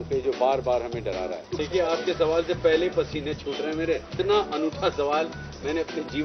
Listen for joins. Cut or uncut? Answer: cut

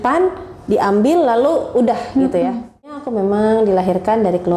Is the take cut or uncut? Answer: cut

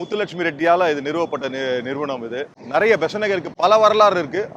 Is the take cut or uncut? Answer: cut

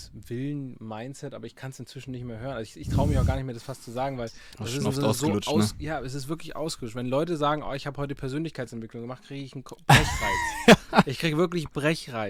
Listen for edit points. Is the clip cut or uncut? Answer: uncut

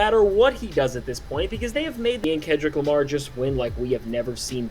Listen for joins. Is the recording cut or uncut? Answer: cut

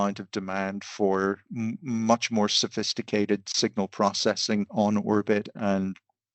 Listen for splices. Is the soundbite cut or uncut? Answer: cut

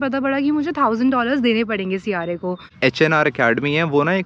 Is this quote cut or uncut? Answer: cut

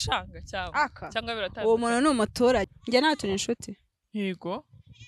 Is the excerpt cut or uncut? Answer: cut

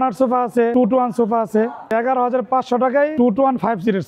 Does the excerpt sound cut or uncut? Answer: cut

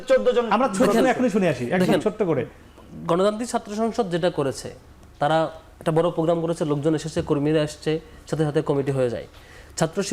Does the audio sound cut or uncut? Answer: uncut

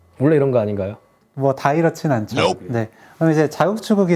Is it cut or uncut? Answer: uncut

